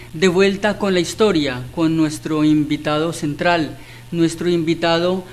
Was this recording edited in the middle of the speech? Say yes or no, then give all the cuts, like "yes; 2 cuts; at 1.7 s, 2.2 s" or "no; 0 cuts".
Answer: no; 0 cuts